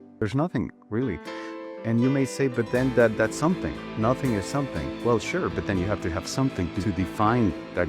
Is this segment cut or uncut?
uncut